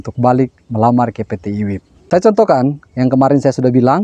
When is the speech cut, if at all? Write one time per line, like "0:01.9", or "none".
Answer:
none